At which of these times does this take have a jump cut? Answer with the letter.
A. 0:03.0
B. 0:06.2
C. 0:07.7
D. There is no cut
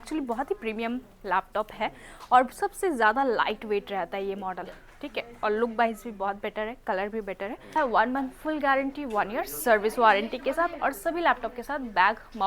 C